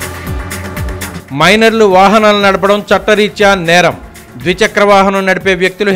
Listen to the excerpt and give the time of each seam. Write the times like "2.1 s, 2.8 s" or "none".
1.1 s